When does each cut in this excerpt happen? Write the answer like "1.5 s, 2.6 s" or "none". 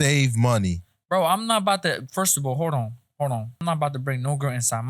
3.6 s